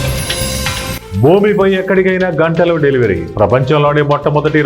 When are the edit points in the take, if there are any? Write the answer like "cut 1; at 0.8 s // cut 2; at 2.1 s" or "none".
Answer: cut 1; at 1.0 s